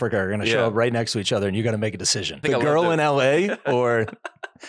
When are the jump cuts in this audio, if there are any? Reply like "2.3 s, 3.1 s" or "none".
2.4 s